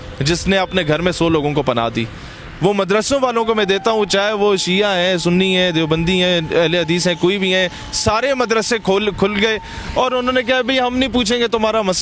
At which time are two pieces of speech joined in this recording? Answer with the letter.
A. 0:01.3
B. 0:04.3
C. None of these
C